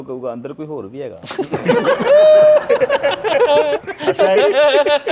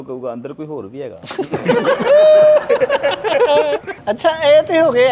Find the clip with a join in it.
second; 1 cut; at 3.9 s

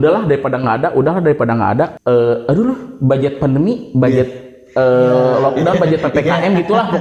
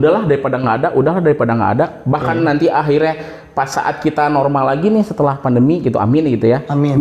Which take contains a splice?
first; 1 cut; at 2.0 s

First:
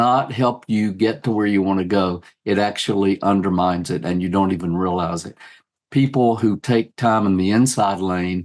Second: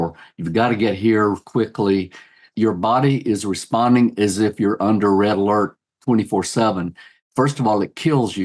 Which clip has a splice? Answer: second; 2 cuts; at 2.4 s, 7.1 s

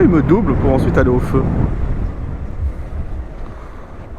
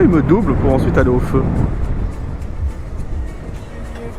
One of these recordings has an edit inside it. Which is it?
first; 1 cut; at 3.2 s

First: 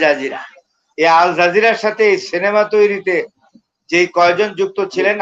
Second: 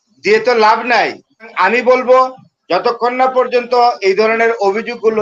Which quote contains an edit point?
second; 1 cut; at 1.5 s

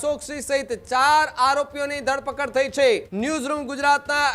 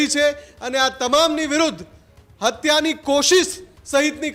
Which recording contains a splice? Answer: first; 1 cut; at 3.1 s

